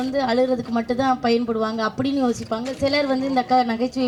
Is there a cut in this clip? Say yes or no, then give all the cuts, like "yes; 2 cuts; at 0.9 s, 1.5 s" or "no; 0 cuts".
no; 0 cuts